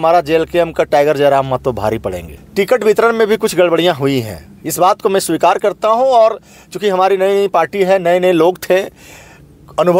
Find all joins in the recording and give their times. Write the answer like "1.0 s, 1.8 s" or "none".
2.3 s